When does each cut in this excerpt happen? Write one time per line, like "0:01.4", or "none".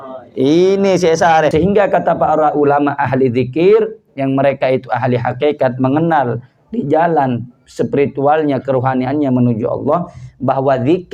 0:01.5